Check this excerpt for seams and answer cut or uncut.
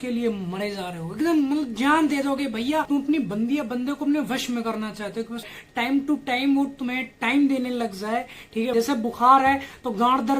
cut